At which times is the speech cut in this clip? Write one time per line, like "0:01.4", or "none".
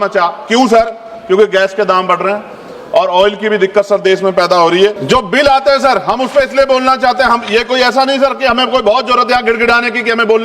0:05.0